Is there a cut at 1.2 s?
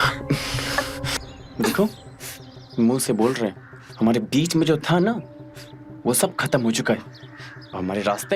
yes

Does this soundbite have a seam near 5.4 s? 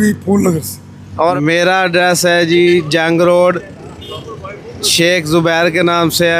no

